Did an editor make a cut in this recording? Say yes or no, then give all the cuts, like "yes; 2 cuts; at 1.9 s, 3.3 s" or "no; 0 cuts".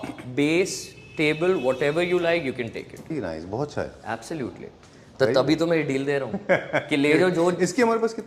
yes; 1 cut; at 3.1 s